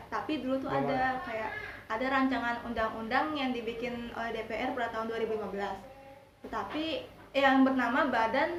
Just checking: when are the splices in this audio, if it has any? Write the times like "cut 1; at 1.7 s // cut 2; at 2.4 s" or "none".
none